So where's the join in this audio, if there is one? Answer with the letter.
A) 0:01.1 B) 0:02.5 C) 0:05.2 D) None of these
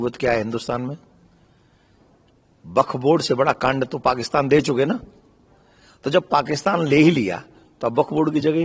D